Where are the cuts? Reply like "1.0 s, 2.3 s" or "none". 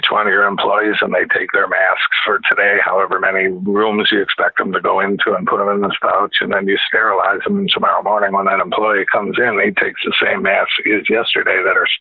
none